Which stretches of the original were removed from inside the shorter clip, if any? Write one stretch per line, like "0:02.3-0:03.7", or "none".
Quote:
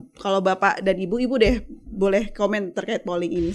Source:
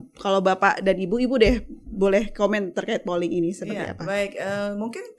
none